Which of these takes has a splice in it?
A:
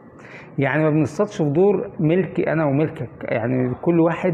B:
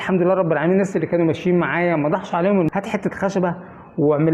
B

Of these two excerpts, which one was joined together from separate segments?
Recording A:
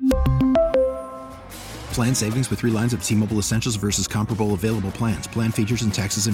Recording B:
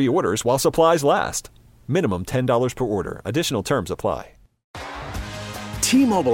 B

